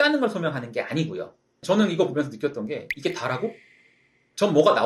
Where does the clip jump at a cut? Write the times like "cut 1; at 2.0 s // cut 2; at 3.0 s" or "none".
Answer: cut 1; at 1.6 s